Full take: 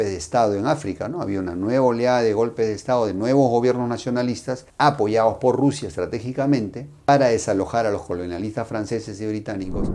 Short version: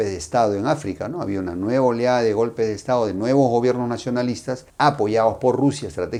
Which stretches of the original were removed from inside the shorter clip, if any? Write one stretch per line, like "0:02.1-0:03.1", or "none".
none